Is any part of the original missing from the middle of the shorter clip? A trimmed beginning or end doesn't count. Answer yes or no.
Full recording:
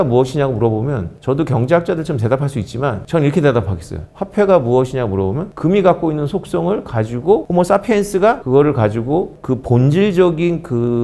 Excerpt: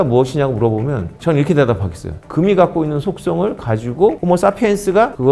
yes